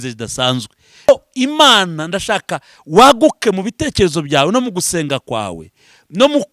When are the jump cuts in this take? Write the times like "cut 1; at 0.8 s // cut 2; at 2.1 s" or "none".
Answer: cut 1; at 1.1 s